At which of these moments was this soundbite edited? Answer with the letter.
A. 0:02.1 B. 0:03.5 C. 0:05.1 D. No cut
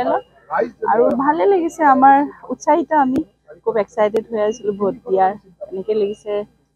D